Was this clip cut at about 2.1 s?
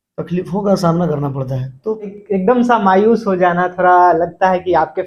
yes; 1 cut; at 2.1 s

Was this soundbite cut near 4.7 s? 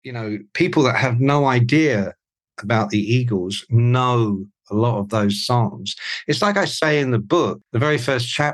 no; 1 cut; at 7.6 s

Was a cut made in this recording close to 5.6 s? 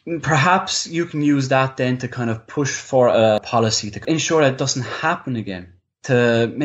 no; 1 cut; at 4.0 s

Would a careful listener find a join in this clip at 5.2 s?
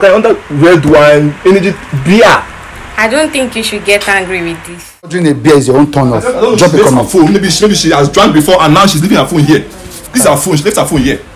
yes; 1 cut; at 5.2 s

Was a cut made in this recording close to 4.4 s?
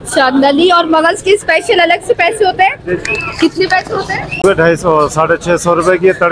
yes; 1 cut; at 4.4 s

